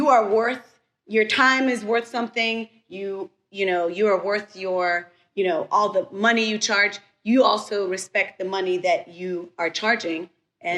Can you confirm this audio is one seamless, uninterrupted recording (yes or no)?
yes